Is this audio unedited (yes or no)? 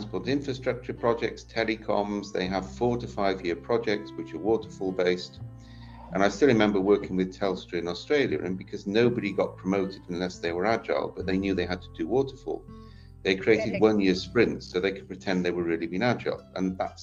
yes